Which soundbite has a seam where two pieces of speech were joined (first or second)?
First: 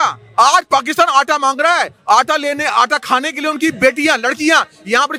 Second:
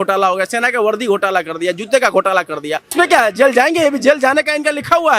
second